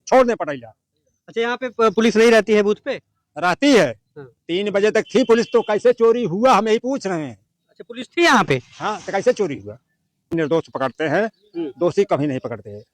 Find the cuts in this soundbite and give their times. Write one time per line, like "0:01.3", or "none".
0:10.3